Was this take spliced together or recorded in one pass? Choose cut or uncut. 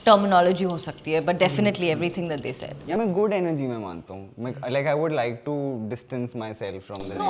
uncut